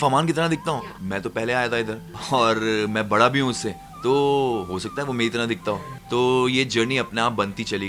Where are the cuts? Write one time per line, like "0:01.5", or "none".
0:00.9
0:05.9